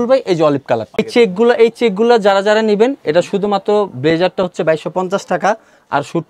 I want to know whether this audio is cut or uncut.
uncut